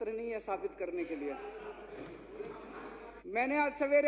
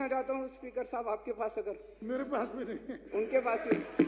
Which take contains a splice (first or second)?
first